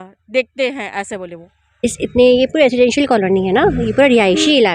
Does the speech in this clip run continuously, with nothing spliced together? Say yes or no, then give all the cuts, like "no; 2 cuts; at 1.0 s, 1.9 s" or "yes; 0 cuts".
no; 1 cut; at 1.8 s